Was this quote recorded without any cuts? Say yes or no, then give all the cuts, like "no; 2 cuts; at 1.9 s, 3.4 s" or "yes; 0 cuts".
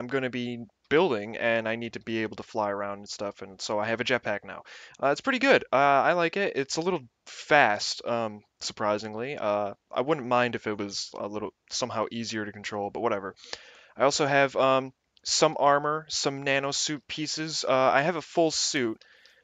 yes; 0 cuts